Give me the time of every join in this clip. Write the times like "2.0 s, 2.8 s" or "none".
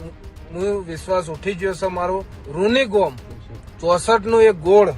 2.4 s